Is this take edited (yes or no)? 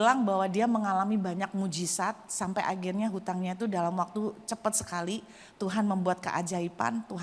no